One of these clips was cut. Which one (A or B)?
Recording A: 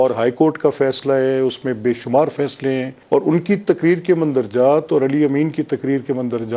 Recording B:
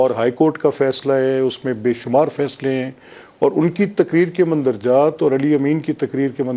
A